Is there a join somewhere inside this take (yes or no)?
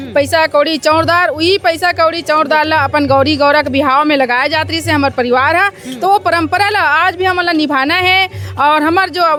no